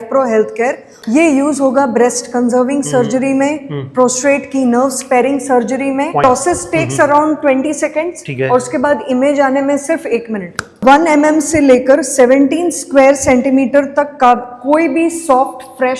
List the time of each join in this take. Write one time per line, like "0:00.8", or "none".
0:00.9
0:06.2
0:10.8